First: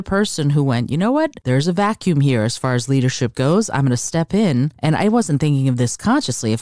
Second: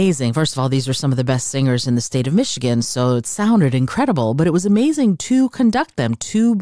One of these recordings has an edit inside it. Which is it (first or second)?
first